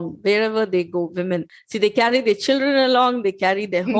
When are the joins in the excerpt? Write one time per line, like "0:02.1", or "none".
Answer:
0:01.6